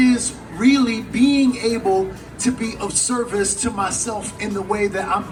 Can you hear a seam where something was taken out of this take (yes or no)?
no